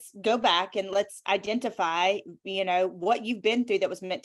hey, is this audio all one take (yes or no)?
yes